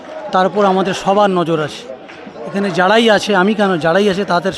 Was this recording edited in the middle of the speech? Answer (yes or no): no